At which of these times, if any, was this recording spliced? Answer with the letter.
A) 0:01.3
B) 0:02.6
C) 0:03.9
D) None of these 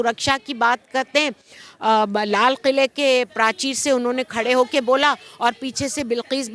B